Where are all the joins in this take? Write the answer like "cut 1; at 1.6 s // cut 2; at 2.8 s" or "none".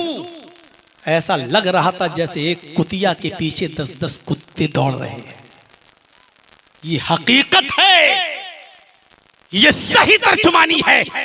none